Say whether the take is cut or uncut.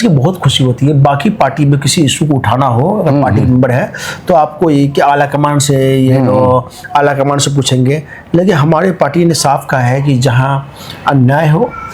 uncut